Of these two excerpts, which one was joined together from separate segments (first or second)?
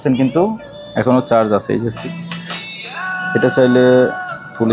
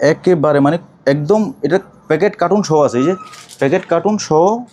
first